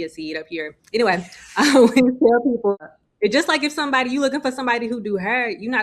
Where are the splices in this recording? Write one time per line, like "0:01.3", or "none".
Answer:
0:02.8